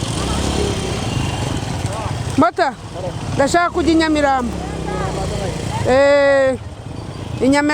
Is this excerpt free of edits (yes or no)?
yes